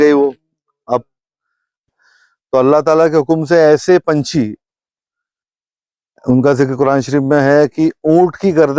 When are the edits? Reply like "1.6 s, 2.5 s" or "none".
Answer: 1.9 s